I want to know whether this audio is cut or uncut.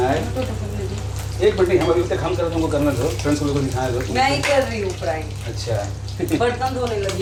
uncut